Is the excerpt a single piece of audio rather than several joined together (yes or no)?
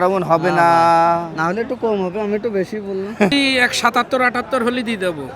no